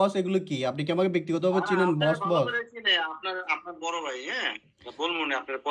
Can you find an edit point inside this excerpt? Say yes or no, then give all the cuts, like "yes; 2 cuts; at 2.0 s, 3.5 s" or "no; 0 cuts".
no; 0 cuts